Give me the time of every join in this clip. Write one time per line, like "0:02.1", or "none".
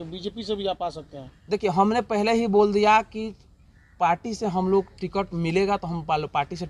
none